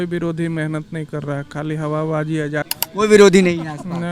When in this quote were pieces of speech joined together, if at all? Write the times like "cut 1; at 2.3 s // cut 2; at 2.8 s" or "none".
cut 1; at 2.7 s